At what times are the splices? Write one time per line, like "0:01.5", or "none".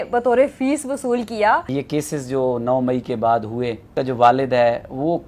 0:01.7
0:03.8

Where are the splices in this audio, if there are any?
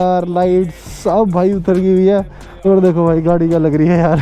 0:02.6

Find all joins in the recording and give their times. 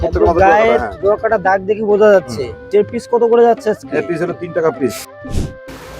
0:02.7
0:05.0

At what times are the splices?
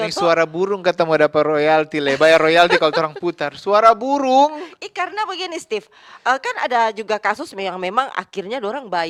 none

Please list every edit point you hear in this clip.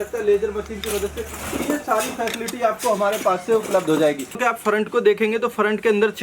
0:04.4

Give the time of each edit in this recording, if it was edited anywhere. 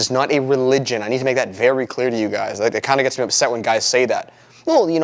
none

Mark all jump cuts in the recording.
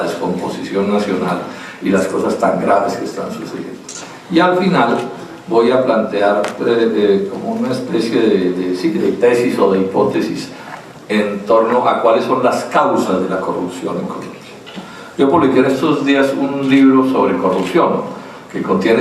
none

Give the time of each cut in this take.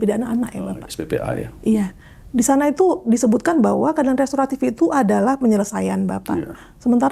none

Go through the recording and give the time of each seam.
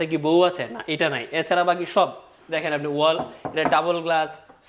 none

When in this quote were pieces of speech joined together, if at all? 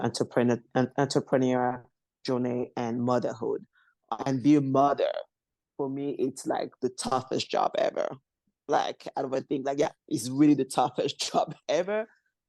0:04.1

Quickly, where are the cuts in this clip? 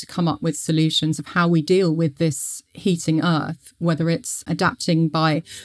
0:01.2

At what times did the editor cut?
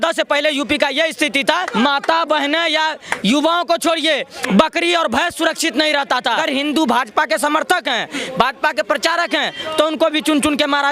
0:01.7
0:06.4

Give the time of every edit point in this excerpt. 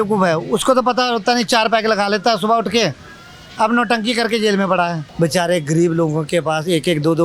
0:05.0

